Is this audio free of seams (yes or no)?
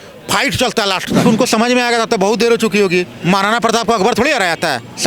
no